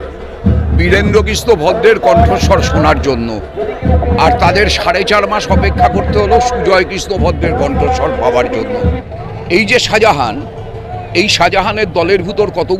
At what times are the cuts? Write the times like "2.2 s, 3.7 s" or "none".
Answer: 9.0 s